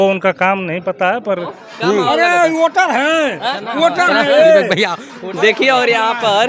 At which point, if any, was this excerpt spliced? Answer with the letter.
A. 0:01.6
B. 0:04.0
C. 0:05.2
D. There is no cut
A